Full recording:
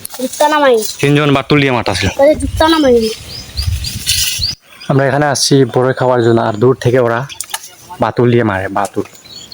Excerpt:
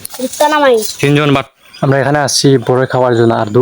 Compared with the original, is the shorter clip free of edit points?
no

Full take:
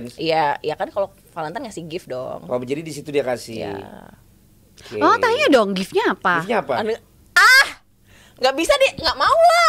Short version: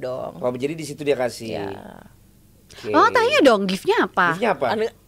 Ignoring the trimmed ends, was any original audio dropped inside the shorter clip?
no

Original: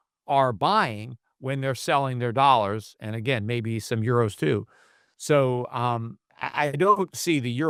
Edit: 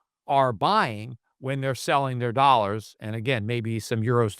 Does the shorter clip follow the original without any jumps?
yes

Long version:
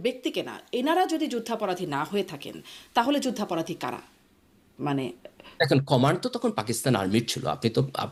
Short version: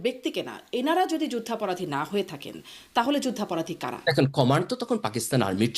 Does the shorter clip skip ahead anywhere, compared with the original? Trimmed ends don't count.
yes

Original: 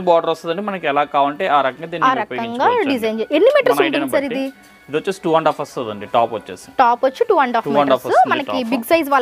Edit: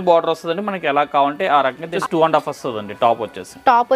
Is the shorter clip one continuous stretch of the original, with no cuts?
no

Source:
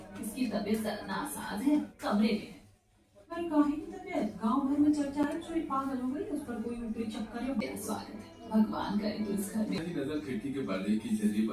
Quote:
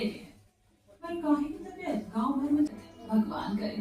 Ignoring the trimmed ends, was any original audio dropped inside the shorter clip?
yes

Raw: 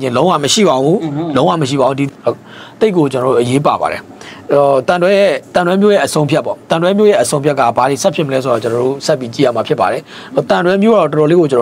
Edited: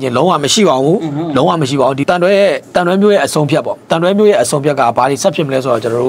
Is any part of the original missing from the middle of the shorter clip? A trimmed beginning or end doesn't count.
yes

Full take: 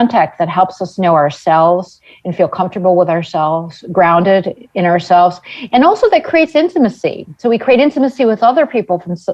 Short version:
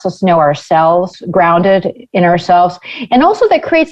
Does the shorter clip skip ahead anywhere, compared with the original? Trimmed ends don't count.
yes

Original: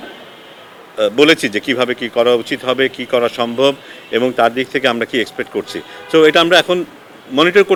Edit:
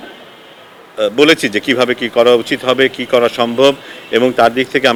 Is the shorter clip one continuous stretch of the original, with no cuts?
yes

